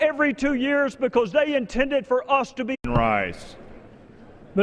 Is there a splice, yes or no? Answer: no